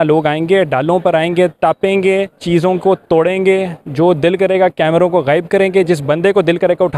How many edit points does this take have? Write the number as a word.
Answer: two